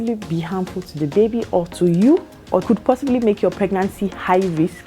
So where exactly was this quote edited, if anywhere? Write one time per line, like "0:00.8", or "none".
0:02.6

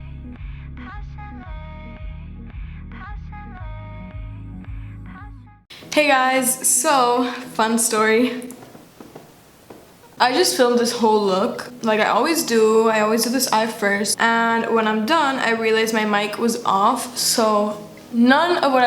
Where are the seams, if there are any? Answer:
0:01.1

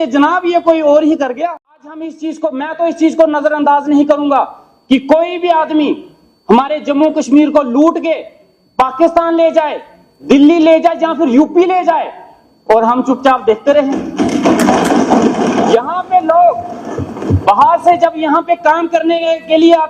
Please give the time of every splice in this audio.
0:01.8

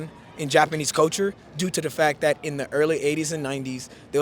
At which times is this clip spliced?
none

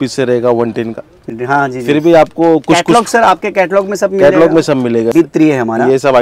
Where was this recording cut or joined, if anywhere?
0:01.3
0:05.1

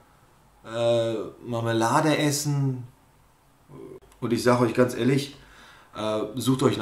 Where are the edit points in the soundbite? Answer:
0:04.0

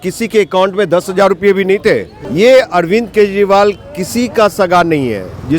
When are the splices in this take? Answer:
0:02.2

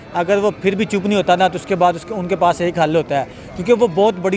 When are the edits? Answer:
none

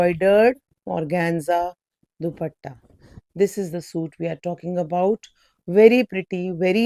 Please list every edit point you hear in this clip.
none

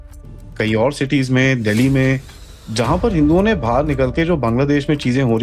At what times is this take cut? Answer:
none

